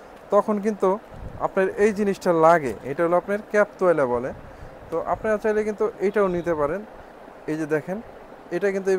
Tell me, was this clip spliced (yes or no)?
no